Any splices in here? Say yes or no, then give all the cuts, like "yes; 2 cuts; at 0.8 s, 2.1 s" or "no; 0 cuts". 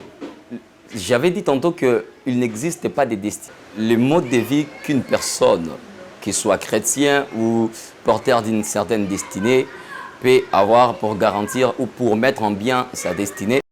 yes; 1 cut; at 3.4 s